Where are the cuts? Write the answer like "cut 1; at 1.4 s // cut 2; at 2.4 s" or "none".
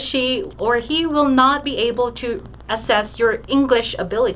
none